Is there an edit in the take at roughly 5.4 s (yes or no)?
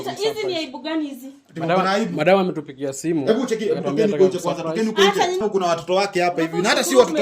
yes